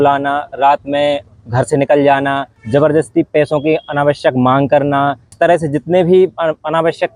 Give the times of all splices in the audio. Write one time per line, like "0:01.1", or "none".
0:02.5
0:05.2